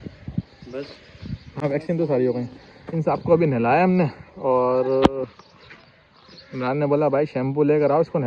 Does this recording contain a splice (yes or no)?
no